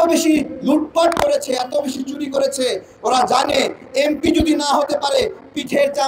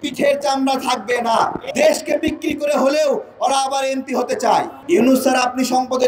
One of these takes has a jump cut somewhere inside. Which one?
second; 2 cuts; at 1.6 s, 4.8 s

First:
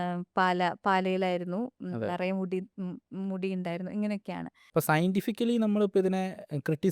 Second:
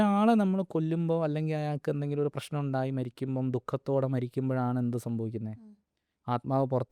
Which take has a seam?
first; 1 cut; at 4.6 s

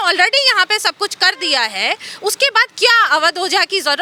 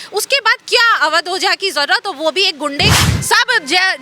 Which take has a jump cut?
second; 1 cut; at 3.0 s

